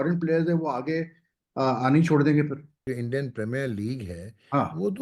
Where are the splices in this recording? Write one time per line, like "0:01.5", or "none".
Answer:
0:02.9